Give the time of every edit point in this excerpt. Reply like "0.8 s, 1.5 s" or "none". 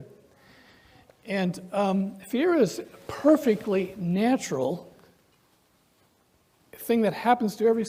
none